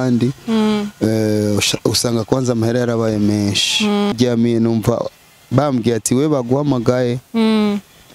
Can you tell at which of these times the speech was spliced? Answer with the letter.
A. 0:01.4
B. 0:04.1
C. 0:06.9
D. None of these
B